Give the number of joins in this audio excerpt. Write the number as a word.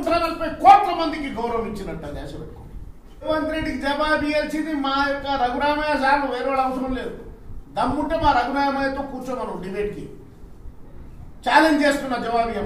one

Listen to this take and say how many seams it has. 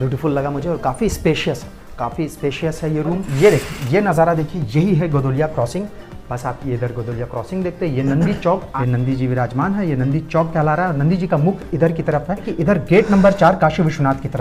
three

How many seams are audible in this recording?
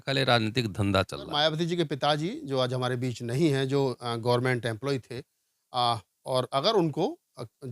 one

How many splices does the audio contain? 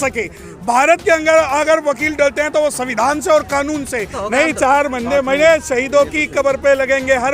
one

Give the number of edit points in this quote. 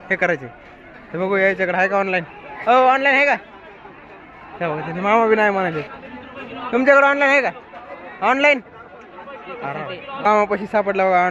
one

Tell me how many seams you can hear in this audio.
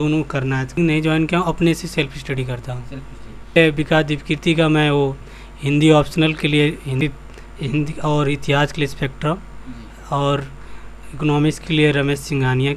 three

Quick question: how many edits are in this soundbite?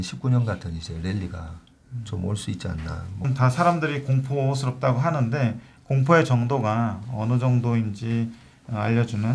one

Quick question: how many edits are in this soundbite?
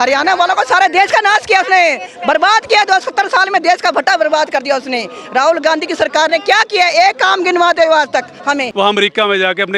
one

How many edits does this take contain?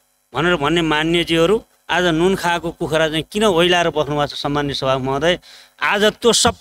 zero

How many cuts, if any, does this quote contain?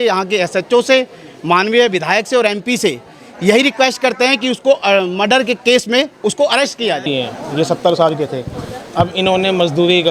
one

